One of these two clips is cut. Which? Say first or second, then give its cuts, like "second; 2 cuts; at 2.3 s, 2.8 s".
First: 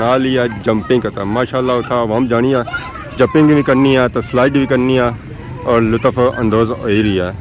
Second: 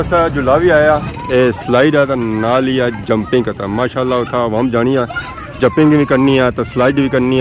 second; 1 cut; at 1.0 s